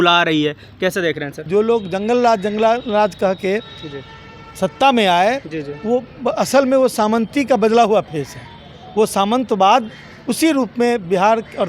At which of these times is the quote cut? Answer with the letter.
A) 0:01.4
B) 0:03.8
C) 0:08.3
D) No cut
A